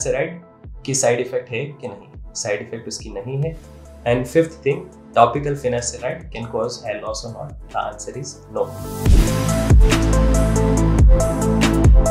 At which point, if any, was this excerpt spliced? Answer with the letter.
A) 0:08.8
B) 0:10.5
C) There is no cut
A